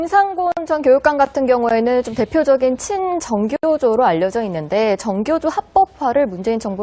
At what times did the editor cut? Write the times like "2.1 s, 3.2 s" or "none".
1.7 s